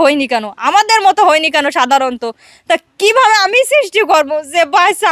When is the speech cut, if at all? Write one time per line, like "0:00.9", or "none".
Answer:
none